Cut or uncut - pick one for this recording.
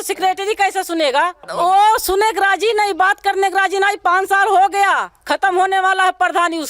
cut